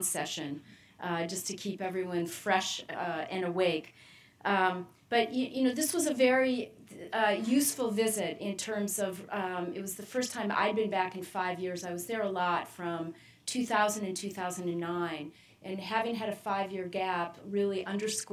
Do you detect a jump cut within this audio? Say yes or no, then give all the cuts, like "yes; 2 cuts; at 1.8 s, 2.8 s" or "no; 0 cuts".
no; 0 cuts